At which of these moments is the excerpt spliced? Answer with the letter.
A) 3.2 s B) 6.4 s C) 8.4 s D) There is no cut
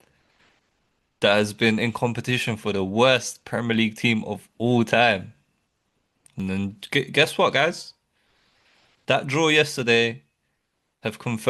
B